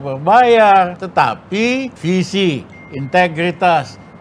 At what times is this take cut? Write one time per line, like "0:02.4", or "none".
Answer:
0:01.0
0:01.9